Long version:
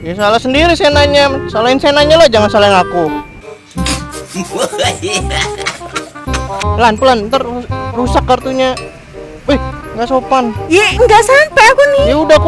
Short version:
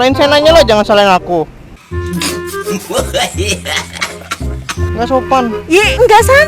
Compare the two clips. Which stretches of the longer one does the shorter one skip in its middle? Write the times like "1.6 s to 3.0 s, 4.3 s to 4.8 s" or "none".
6.4 s to 9.8 s